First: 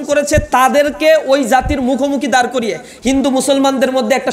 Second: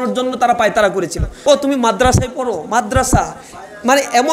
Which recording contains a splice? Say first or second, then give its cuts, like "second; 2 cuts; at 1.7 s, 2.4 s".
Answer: second; 1 cut; at 1.3 s